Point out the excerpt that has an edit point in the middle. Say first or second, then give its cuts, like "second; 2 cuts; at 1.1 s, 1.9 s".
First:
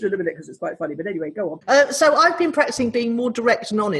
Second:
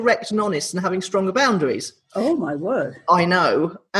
first; 1 cut; at 1.6 s